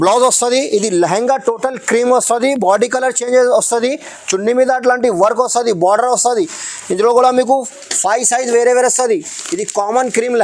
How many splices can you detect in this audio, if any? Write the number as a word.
zero